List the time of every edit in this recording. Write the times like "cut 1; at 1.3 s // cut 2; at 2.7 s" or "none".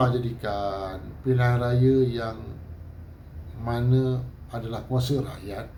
none

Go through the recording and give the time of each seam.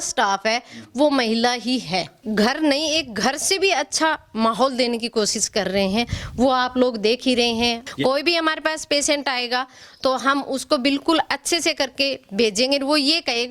cut 1; at 2.2 s // cut 2; at 7.8 s

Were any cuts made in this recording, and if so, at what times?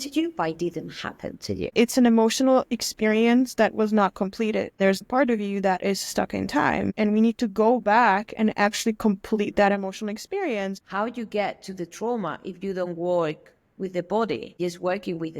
cut 1; at 1.7 s // cut 2; at 5.1 s // cut 3; at 6.9 s // cut 4; at 10.8 s // cut 5; at 14.6 s

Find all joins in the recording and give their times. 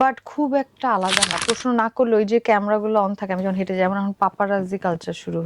cut 1; at 1.4 s

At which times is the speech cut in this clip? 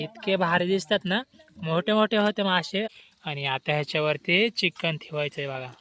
cut 1; at 2.9 s

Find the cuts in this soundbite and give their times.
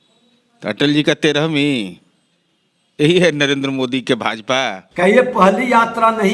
cut 1; at 4.8 s

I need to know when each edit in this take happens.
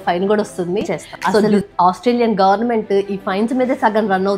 cut 1; at 1.4 s

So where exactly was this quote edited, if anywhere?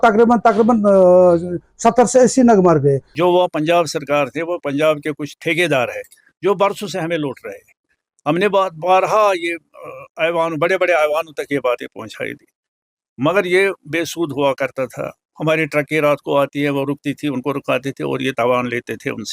cut 1; at 3.1 s

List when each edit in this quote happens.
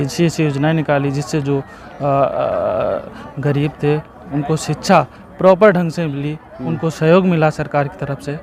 none

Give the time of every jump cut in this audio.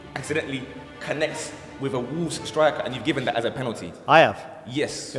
none

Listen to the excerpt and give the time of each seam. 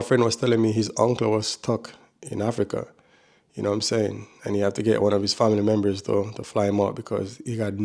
none

